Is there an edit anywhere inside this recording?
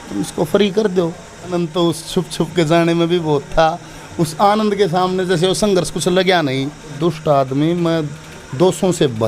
yes; 2 cuts; at 1.5 s, 7.0 s

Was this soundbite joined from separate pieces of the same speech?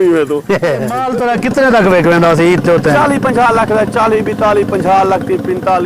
yes; 1 cut; at 1.0 s

